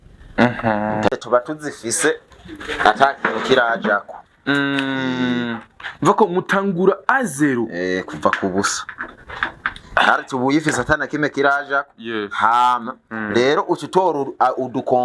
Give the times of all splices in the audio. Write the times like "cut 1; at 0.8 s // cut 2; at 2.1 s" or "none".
cut 1; at 1.1 s

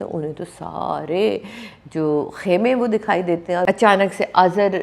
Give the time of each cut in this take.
cut 1; at 3.6 s

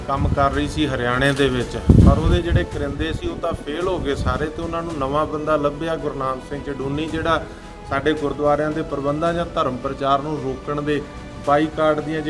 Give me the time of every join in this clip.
none

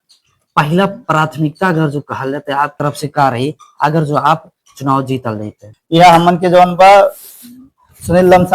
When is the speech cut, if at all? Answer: cut 1; at 2.7 s // cut 2; at 5.7 s

